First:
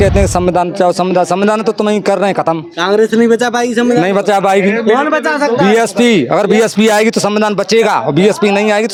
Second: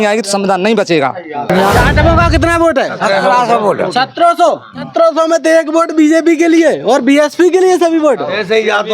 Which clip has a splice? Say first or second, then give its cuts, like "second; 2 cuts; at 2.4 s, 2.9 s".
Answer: second; 2 cuts; at 1.5 s, 4.9 s